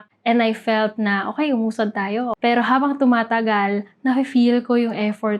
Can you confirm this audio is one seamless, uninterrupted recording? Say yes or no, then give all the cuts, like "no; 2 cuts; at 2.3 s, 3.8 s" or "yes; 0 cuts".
no; 1 cut; at 2.3 s